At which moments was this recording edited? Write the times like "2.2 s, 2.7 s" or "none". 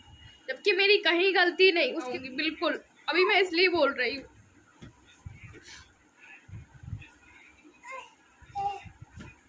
2.2 s